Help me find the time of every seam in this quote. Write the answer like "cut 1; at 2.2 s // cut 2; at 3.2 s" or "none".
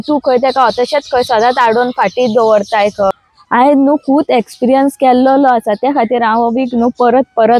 cut 1; at 3.1 s